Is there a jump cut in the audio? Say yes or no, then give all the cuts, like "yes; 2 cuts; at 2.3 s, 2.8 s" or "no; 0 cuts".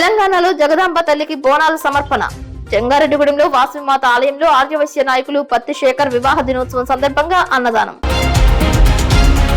yes; 1 cut; at 8.0 s